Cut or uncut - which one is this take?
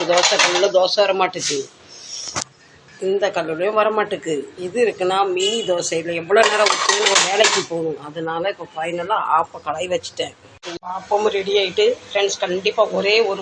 cut